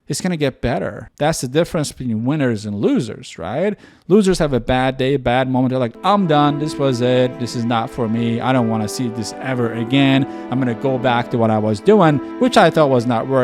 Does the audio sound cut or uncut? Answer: uncut